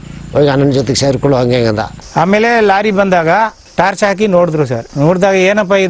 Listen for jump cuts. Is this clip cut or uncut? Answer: cut